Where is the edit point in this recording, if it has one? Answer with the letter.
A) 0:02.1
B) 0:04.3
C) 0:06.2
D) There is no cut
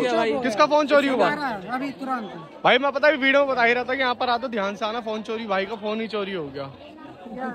D